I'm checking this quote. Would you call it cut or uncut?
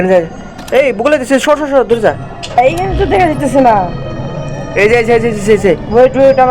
cut